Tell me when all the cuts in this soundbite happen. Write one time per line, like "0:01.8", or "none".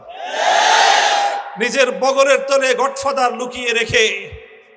none